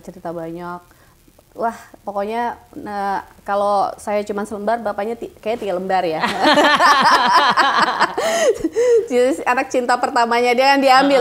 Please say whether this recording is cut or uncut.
uncut